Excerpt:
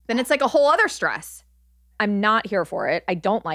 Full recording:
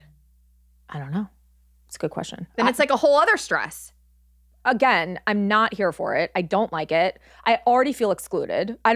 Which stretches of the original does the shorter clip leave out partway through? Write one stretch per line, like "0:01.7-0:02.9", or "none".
0:04.4-0:05.2